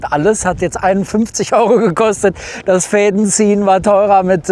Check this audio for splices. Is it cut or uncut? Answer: uncut